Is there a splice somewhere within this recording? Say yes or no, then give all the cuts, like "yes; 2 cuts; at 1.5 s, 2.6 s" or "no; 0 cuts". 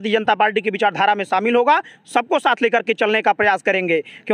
no; 0 cuts